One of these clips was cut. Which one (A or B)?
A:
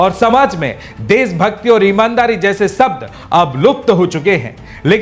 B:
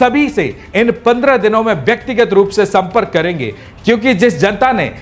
B